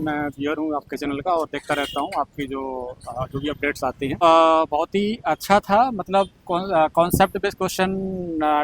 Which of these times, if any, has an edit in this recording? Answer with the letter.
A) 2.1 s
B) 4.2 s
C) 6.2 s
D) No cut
B